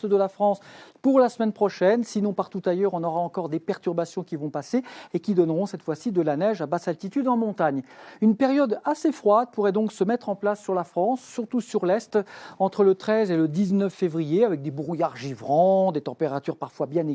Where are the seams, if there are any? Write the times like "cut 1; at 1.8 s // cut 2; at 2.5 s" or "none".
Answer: cut 1; at 2.5 s